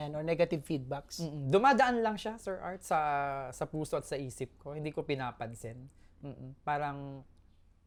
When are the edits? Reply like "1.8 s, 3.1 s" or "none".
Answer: none